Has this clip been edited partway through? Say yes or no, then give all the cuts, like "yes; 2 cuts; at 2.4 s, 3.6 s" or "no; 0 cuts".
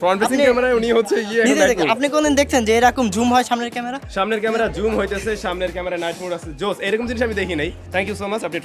no; 0 cuts